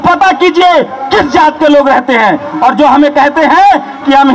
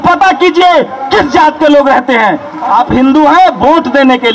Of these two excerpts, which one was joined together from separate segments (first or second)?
second